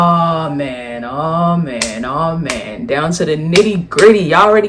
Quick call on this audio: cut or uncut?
uncut